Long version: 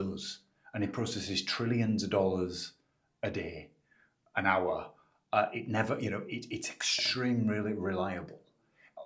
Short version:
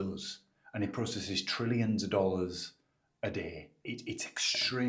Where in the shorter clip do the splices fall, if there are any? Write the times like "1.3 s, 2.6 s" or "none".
3.9 s